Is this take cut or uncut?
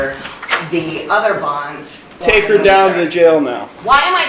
cut